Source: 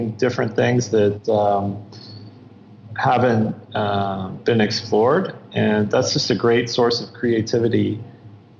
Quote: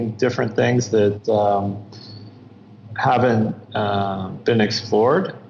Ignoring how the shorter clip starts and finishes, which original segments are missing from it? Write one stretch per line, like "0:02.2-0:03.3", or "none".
none